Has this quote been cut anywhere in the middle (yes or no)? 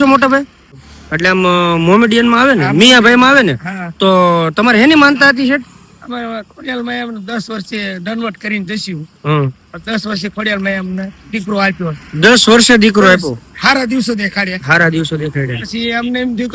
yes